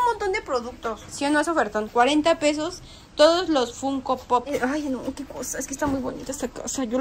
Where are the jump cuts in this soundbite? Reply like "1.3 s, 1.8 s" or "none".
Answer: 1.0 s, 4.5 s